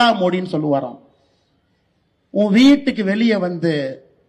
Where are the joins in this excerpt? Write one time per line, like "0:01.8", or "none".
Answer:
none